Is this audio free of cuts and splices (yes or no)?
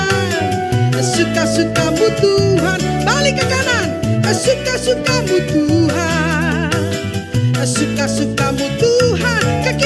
yes